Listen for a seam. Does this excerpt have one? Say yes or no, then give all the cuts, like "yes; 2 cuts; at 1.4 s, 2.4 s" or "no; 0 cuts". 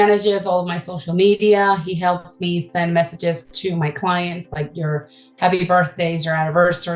no; 0 cuts